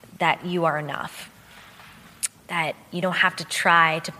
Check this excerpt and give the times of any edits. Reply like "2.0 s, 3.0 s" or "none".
none